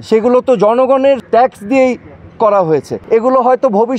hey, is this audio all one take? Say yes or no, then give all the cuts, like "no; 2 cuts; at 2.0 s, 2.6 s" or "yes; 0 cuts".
no; 2 cuts; at 1.2 s, 3.0 s